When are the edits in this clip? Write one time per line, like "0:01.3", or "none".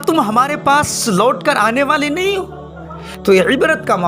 0:03.1